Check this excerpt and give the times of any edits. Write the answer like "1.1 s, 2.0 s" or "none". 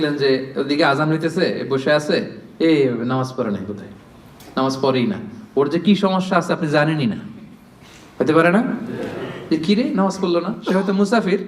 none